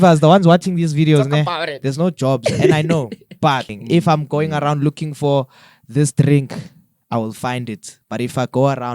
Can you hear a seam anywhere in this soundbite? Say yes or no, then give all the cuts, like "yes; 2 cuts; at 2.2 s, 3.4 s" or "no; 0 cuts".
yes; 1 cut; at 3.8 s